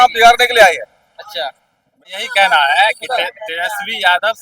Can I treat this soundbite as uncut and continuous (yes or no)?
no